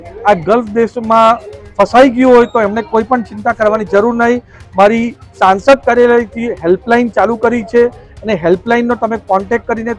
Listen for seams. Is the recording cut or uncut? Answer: uncut